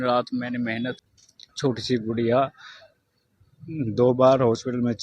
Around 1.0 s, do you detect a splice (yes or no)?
yes